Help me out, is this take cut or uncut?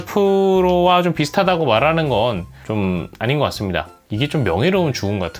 uncut